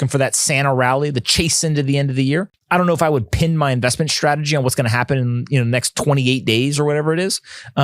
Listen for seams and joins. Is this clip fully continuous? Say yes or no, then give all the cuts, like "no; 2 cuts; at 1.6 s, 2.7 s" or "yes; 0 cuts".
no; 1 cut; at 2.6 s